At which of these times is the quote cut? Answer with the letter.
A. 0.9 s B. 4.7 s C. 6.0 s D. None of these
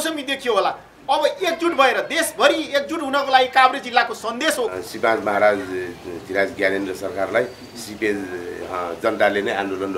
B